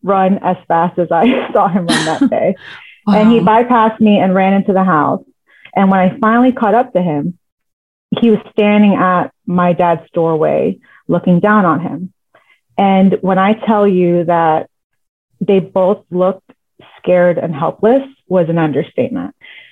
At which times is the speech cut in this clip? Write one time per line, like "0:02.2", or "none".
none